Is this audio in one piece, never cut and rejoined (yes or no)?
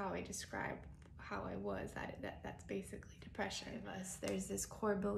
no